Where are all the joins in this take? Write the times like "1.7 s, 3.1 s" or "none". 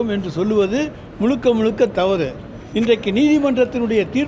2.6 s